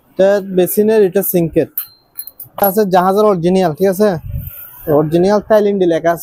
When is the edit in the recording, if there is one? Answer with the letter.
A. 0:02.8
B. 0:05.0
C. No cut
C